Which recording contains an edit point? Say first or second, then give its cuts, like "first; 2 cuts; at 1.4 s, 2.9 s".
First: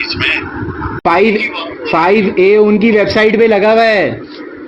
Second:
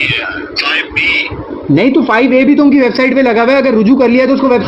first; 1 cut; at 1.0 s